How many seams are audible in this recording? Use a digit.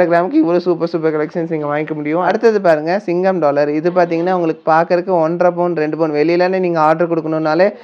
1